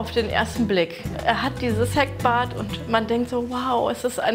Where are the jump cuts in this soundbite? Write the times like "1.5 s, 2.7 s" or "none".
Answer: none